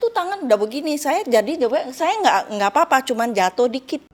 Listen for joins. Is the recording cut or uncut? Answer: uncut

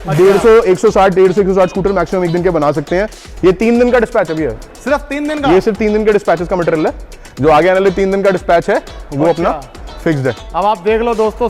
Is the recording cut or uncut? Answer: cut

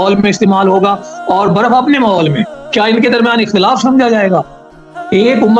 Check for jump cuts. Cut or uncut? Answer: cut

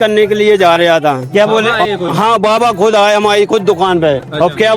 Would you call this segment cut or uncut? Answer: cut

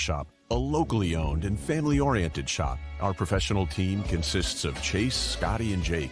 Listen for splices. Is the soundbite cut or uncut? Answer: uncut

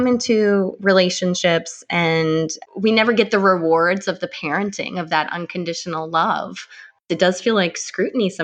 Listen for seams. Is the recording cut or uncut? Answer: cut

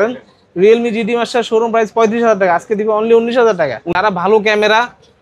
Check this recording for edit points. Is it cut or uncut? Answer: cut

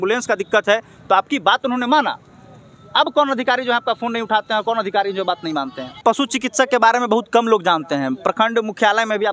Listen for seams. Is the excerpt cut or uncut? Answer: cut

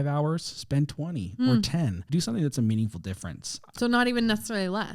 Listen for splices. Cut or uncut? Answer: cut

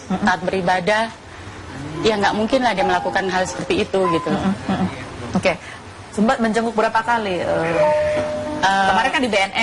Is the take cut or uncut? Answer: cut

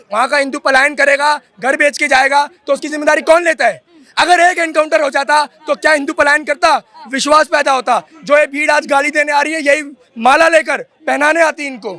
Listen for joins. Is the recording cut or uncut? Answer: uncut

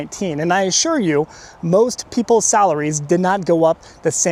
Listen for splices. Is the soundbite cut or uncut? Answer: uncut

